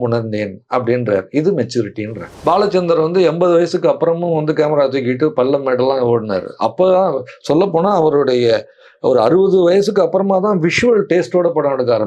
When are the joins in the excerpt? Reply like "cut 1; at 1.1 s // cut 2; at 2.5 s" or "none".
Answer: cut 1; at 2.3 s